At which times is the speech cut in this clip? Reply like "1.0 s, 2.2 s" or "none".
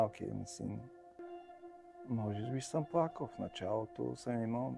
1.2 s